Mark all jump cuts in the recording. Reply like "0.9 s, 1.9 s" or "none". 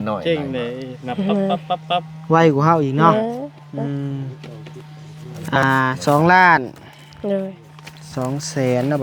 none